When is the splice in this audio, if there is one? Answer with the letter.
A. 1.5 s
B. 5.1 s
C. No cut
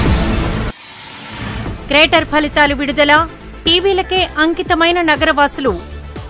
A